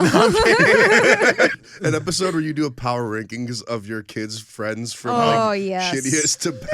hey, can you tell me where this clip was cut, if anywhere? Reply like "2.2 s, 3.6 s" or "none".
1.5 s